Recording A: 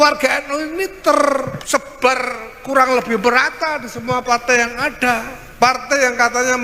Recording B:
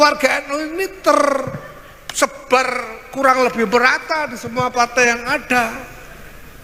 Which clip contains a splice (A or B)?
A